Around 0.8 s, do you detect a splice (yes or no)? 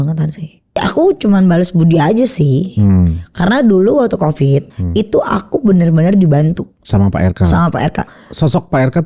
yes